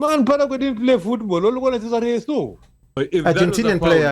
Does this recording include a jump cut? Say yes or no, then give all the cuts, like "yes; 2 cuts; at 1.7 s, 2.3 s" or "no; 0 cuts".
yes; 1 cut; at 2.9 s